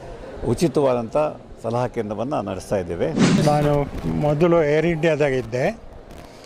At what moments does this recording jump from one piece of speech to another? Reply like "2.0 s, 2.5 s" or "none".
3.1 s